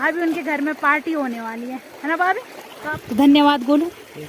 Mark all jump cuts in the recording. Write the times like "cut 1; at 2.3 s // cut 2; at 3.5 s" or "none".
cut 1; at 2.8 s